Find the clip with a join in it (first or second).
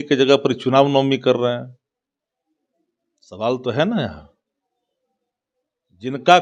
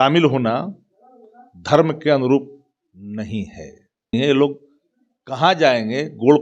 second